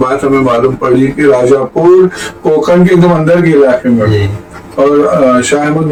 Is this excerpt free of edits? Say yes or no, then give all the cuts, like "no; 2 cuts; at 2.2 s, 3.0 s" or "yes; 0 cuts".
yes; 0 cuts